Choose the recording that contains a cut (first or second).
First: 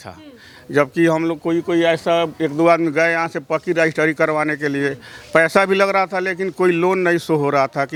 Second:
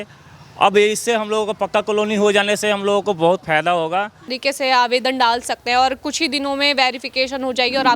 second